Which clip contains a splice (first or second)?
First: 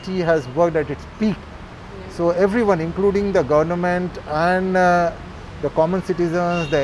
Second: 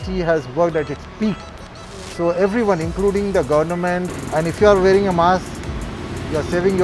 second